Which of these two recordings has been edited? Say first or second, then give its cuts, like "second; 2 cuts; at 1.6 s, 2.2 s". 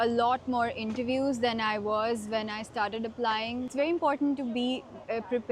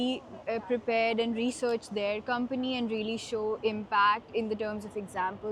first; 1 cut; at 3.7 s